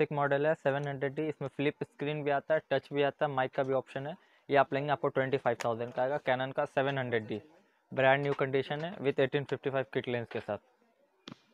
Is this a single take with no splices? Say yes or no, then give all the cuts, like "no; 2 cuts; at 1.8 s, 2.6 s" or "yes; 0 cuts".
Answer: yes; 0 cuts